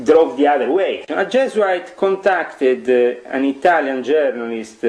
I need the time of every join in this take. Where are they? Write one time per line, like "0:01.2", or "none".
0:01.0